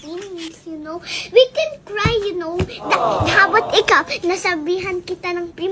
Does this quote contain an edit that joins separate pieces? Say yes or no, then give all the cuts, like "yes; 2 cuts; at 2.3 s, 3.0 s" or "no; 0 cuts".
no; 0 cuts